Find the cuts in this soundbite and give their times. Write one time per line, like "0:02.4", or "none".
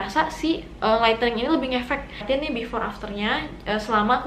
0:02.2